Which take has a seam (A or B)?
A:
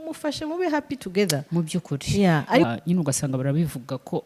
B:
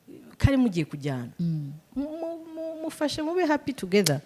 A